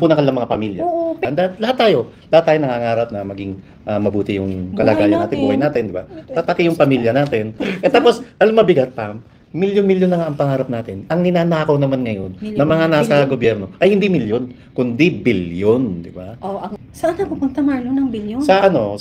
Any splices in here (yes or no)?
yes